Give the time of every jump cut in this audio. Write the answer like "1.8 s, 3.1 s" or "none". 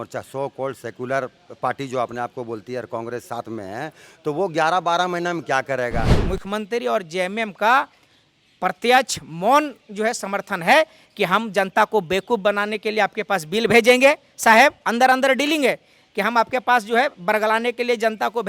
6.2 s

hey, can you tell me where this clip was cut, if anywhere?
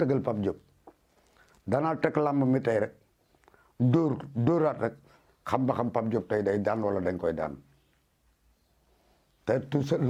none

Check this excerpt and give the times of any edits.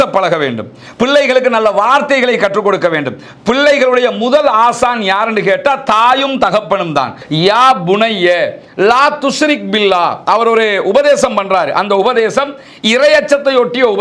7.2 s

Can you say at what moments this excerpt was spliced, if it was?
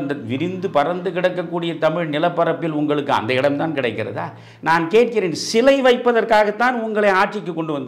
none

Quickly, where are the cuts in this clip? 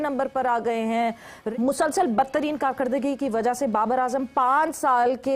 1.4 s

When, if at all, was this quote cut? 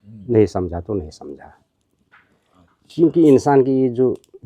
none

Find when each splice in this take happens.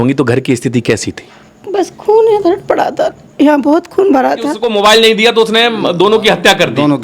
4.6 s

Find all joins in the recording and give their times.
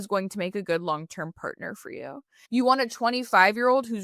2.3 s

